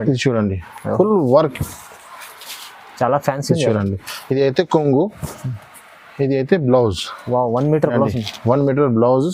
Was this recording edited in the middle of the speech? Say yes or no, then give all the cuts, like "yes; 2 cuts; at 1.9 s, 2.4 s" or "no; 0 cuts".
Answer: no; 0 cuts